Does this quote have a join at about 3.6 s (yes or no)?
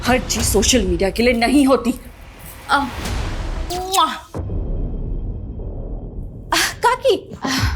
yes